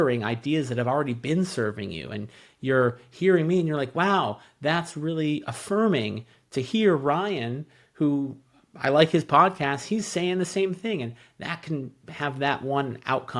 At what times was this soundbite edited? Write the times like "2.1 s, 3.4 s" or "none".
none

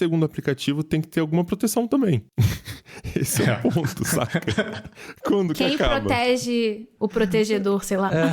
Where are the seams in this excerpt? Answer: none

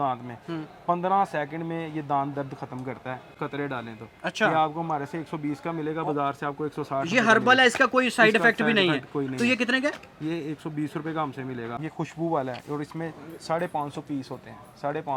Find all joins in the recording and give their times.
none

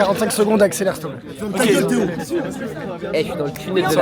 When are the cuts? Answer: none

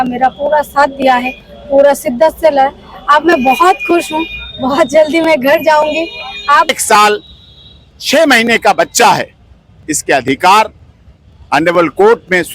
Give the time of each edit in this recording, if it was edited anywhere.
6.7 s

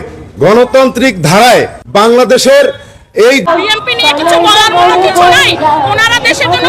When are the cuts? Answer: 3.4 s

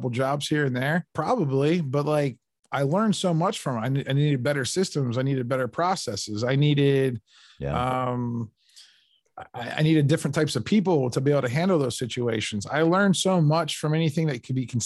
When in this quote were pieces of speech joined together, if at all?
none

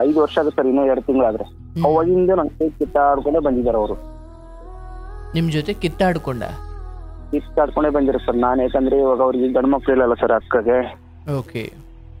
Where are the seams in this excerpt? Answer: none

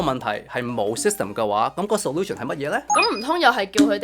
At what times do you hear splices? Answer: 2.9 s

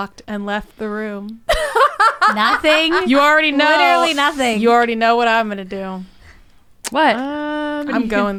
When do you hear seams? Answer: none

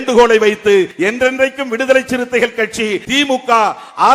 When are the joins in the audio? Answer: 0.9 s, 3.0 s

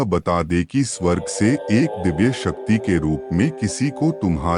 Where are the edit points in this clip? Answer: none

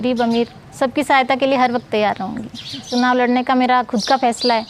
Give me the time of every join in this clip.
2.9 s

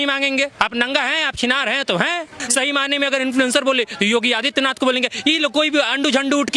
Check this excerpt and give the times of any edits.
2.4 s

